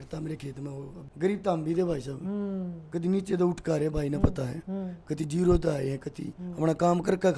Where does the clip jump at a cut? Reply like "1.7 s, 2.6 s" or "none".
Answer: 1.0 s